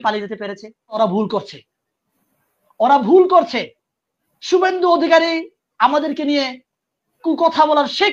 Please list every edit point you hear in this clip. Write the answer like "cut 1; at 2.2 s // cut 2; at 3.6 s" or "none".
cut 1; at 1.0 s